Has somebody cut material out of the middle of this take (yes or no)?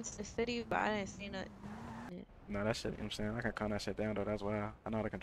yes